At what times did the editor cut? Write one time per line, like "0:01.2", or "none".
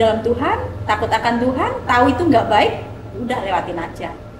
none